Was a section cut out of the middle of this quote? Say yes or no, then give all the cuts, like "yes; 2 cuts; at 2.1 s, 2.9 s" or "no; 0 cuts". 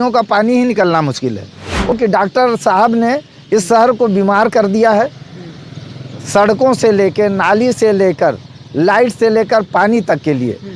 yes; 1 cut; at 1.9 s